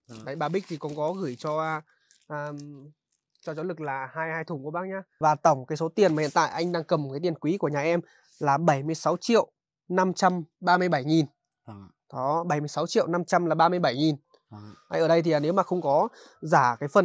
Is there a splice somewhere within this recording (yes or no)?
yes